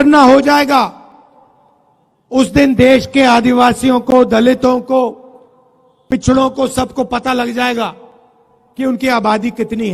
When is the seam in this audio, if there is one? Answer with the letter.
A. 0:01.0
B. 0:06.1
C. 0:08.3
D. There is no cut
D